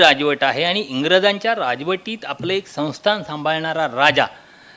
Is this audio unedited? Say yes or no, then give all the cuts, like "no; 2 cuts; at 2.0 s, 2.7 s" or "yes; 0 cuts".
yes; 0 cuts